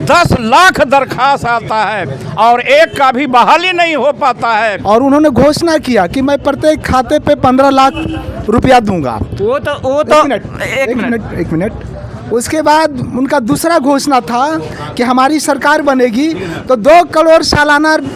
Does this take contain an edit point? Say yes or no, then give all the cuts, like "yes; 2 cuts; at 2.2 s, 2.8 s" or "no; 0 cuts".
yes; 1 cut; at 4.8 s